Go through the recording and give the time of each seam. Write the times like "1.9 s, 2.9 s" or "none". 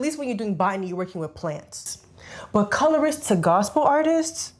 1.9 s